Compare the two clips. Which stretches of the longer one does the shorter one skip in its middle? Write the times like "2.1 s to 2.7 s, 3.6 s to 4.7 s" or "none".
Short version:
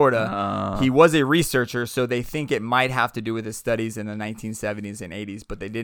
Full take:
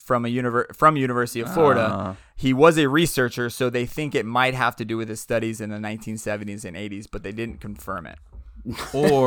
none